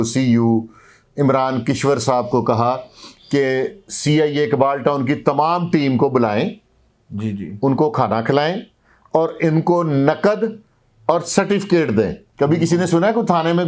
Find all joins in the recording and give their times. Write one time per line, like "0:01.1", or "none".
0:12.2